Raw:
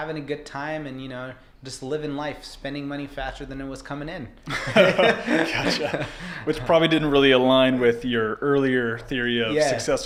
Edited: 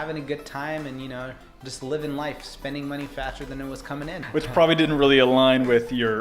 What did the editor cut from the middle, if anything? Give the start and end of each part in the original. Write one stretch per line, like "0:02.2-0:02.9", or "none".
0:04.1-0:06.3